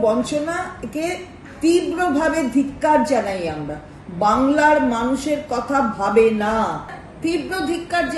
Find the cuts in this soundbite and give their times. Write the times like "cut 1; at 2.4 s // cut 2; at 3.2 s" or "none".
cut 1; at 7.0 s